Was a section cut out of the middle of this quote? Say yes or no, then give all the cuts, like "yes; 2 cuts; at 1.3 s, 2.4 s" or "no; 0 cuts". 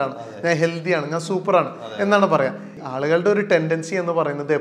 yes; 1 cut; at 2.7 s